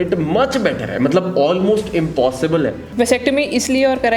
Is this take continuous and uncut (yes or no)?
no